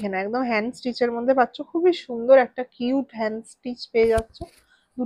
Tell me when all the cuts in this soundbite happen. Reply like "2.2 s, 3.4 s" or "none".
none